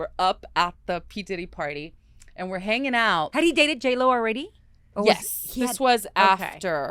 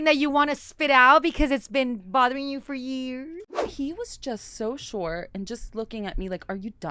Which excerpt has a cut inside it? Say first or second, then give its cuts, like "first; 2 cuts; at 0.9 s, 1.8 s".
second; 1 cut; at 3.5 s